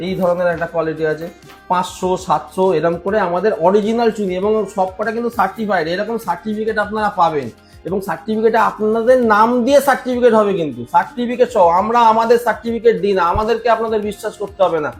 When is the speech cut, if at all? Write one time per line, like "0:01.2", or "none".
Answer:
none